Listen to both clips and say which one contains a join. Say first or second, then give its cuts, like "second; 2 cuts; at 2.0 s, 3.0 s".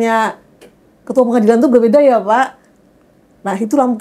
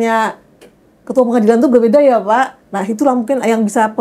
second; 1 cut; at 2.7 s